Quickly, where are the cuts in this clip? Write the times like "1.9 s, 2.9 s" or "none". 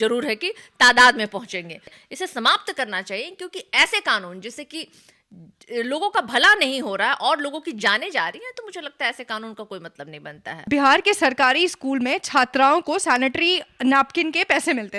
2.0 s, 10.6 s